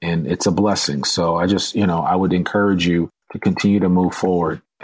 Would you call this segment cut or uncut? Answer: uncut